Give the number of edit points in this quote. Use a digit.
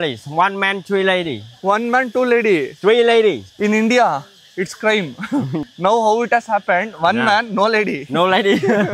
2